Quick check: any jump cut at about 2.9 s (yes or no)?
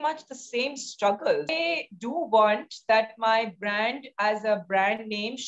no